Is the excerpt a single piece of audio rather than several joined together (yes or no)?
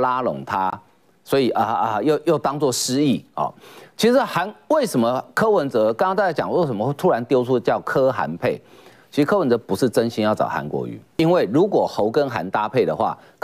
no